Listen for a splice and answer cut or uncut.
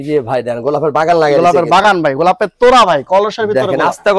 uncut